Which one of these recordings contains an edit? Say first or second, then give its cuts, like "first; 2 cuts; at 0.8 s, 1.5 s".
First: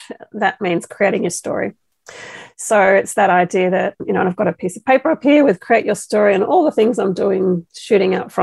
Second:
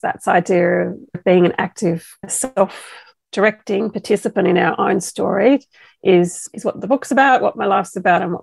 second; 2 cuts; at 1.2 s, 2.2 s